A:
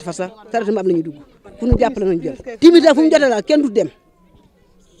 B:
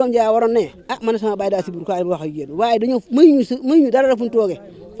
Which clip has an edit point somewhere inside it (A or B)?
A